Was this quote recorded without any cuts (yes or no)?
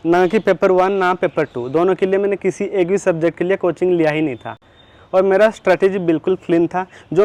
yes